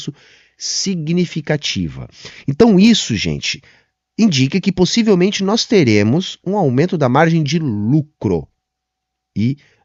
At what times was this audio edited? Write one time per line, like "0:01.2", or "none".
none

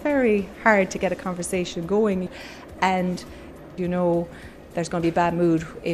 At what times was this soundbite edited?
0:02.3
0:03.7

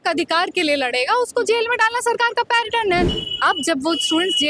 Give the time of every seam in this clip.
0:03.2

